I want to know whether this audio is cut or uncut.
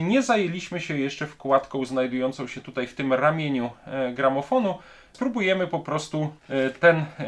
cut